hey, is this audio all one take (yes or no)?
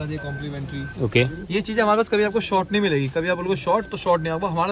yes